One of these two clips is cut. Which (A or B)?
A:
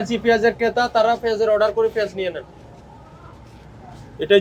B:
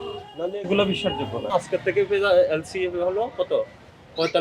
B